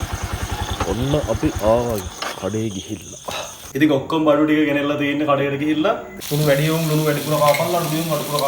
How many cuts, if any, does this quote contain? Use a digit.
2